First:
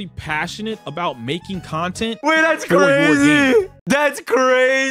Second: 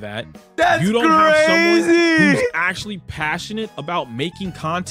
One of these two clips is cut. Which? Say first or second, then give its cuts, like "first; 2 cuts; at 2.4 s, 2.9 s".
first; 1 cut; at 3.8 s